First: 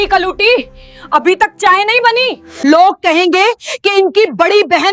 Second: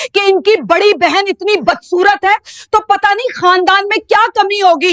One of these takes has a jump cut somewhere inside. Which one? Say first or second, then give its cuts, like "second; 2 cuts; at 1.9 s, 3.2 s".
first; 1 cut; at 2.4 s